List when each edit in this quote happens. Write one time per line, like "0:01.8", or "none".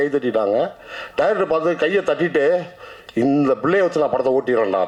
none